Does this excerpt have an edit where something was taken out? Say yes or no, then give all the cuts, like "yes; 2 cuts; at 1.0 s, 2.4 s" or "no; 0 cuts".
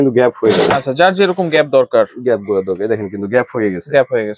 no; 0 cuts